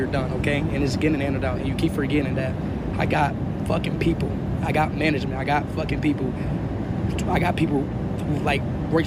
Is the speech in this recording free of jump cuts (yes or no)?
yes